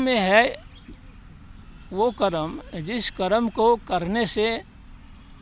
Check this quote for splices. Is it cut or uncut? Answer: uncut